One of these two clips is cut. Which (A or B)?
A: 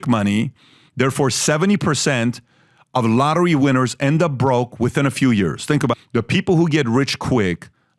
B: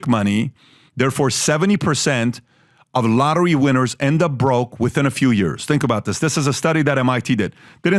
A